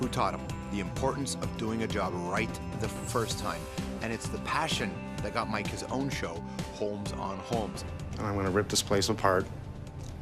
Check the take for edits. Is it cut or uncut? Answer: cut